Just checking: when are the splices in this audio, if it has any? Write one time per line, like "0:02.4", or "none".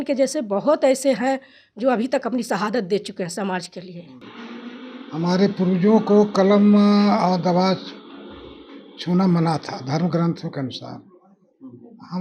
0:04.3